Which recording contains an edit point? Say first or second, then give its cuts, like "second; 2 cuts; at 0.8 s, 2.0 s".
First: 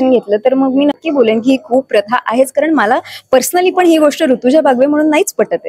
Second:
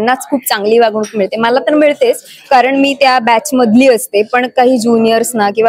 first; 1 cut; at 1.0 s